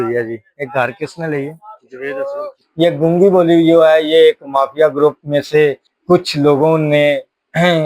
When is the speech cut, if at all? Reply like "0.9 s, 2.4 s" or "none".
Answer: 2.6 s